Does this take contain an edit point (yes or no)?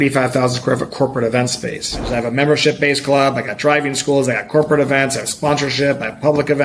yes